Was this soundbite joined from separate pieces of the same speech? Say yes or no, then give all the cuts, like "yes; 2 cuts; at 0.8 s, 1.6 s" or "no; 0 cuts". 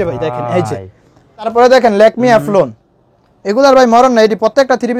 yes; 1 cut; at 1.5 s